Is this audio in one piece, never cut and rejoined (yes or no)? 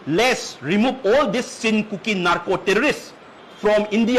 yes